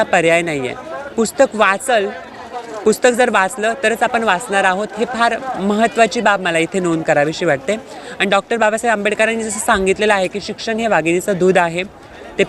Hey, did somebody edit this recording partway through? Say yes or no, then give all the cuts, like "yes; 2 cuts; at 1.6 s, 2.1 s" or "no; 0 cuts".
no; 0 cuts